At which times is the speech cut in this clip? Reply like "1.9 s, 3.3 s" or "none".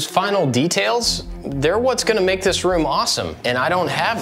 3.3 s